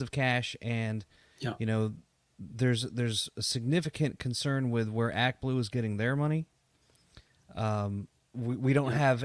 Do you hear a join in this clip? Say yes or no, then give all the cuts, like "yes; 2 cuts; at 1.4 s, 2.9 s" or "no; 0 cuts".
no; 0 cuts